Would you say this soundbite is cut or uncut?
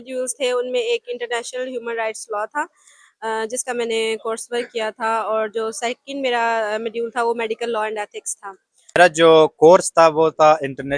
cut